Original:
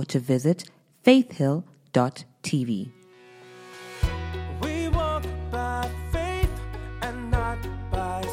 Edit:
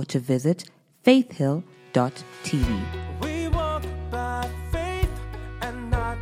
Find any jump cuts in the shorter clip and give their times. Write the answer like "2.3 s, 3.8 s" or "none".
3.0 s